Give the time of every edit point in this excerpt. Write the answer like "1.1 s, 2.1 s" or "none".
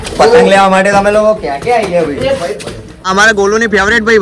3.1 s

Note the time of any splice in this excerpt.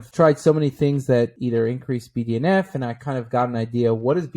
1.4 s

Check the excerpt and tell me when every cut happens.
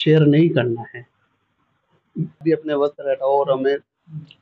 2.4 s

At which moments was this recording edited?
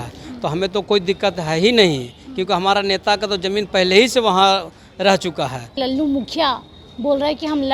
5.8 s

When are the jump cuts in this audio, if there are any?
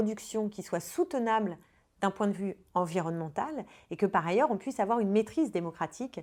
none

